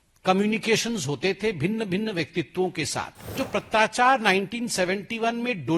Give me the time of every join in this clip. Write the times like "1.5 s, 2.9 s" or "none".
3.4 s